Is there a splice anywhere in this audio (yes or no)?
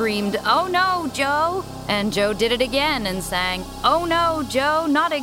yes